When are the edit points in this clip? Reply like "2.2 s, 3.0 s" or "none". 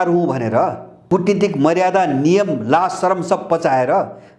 1.0 s